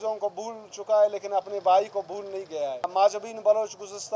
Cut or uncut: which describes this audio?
cut